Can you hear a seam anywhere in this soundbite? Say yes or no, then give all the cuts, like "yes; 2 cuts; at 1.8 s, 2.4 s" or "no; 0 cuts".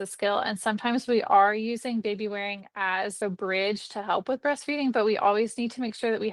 yes; 1 cut; at 3.2 s